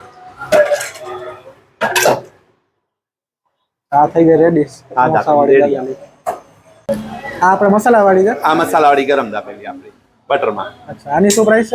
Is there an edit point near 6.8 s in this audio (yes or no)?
yes